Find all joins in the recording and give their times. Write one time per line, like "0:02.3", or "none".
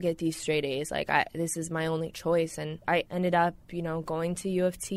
0:02.8

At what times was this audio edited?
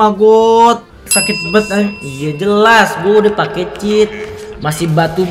0:01.1

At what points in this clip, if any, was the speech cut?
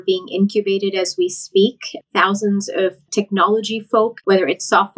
0:03.0
0:04.2

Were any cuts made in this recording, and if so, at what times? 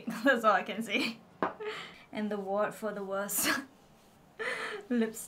0:01.9

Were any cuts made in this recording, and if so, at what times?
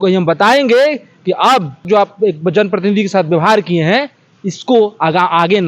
0:01.9

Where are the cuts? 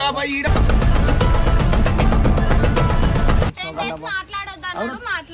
0:03.5

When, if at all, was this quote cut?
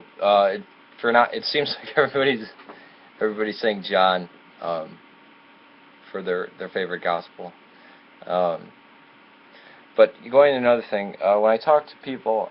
0:06.2

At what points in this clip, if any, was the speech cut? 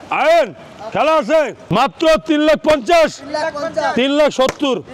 0:01.6

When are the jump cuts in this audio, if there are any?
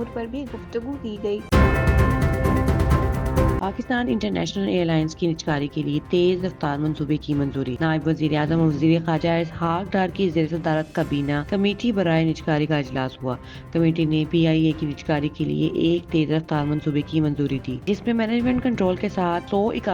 0:01.5
0:03.6

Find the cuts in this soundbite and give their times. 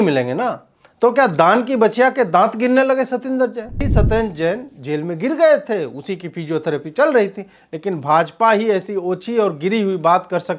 0:03.9

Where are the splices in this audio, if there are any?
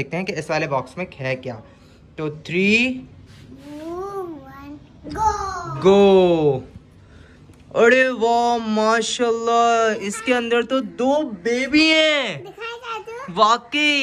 none

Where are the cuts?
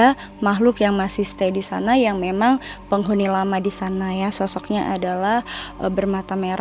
none

